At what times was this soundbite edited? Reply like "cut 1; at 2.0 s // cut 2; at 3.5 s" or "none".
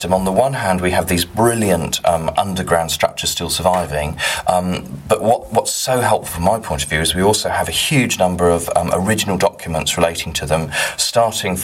none